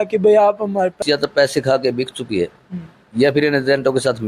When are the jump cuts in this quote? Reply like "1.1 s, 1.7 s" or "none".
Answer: 1.0 s